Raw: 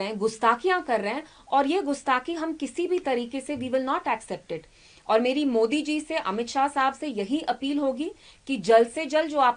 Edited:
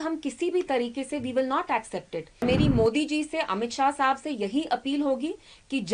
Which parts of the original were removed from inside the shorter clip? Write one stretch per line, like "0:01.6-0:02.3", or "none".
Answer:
0:04.8-0:05.2